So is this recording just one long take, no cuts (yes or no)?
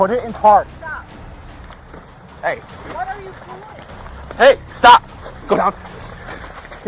yes